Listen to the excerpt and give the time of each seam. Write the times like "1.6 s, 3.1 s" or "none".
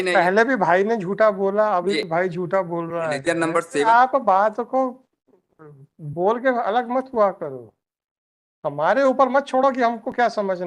3.8 s